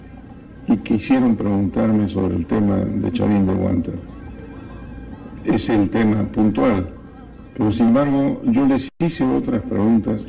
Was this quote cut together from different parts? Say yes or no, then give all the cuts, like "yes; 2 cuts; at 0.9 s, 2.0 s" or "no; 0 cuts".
yes; 1 cut; at 2.8 s